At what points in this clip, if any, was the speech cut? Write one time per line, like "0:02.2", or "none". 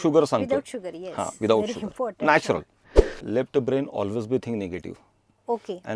0:03.2